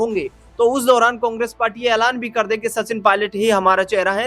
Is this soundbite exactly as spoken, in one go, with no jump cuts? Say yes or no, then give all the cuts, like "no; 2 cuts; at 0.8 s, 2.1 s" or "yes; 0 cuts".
yes; 0 cuts